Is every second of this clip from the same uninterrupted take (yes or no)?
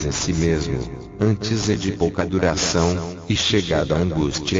yes